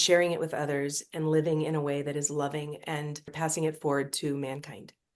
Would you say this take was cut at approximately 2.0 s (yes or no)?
no